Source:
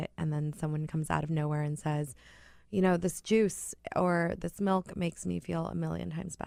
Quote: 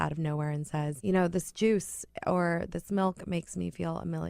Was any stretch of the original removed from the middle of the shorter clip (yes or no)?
yes